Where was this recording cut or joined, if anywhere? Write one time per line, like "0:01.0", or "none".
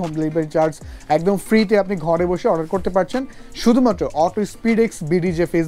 none